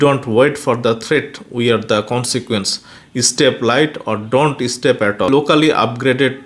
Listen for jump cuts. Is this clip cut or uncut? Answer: cut